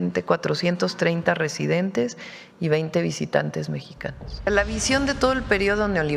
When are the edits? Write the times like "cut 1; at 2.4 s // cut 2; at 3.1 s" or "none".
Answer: cut 1; at 4.5 s

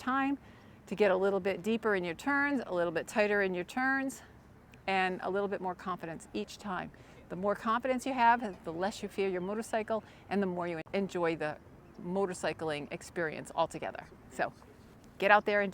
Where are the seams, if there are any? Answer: cut 1; at 10.8 s

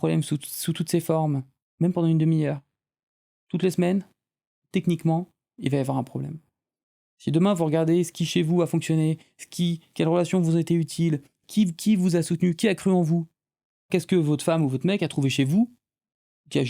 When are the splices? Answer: cut 1; at 1.6 s // cut 2; at 5.5 s // cut 3; at 13.9 s

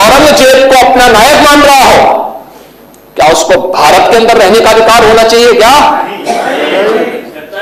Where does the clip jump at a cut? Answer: none

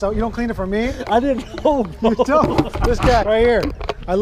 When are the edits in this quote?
cut 1; at 3.2 s

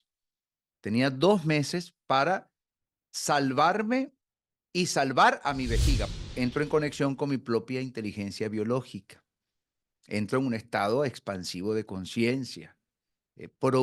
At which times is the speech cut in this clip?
cut 1; at 6.1 s

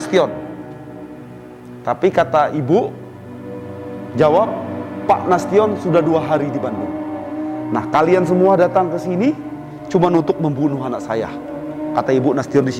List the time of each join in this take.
none

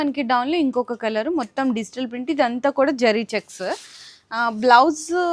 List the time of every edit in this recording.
none

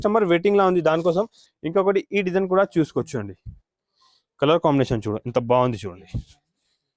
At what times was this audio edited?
cut 1; at 1.4 s

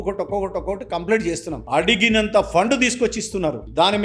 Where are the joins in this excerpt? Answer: cut 1; at 1.6 s

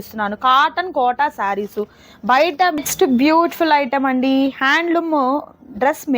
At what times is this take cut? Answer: cut 1; at 2.8 s

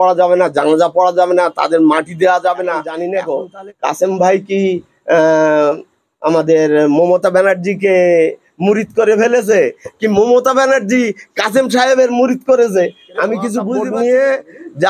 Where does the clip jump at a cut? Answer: cut 1; at 3.0 s // cut 2; at 13.7 s

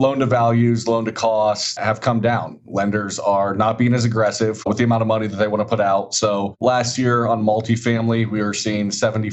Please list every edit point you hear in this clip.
cut 1; at 1.7 s // cut 2; at 6.6 s

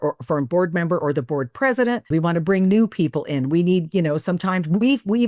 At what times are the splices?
cut 1; at 2.1 s

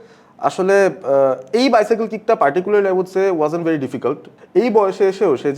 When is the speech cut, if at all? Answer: cut 1; at 4.3 s

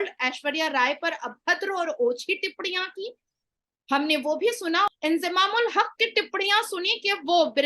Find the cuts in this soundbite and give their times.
cut 1; at 4.9 s

